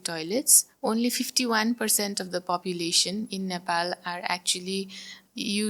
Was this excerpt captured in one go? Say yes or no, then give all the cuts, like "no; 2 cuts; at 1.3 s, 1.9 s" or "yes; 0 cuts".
yes; 0 cuts